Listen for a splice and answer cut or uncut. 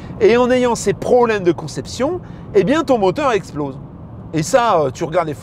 uncut